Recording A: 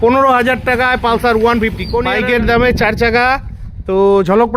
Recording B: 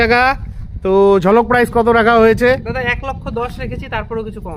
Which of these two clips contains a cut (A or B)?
A